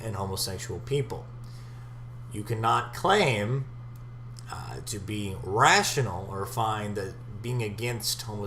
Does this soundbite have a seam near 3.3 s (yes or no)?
yes